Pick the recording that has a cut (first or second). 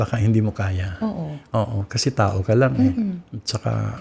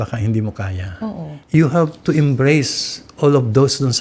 second